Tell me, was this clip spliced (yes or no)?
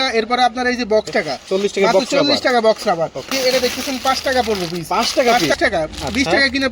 yes